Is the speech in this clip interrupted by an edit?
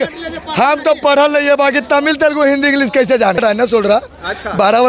yes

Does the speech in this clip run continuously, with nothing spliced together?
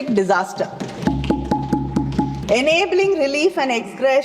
no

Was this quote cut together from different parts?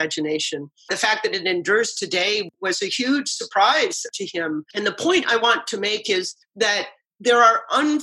yes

